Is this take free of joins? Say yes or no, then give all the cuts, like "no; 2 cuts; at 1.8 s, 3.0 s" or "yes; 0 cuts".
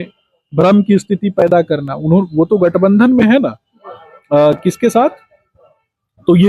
yes; 0 cuts